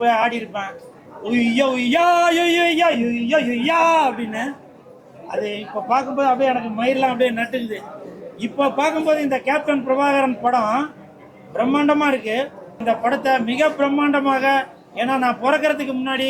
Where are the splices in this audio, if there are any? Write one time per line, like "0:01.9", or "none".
0:12.8